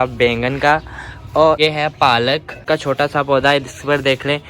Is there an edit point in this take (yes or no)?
yes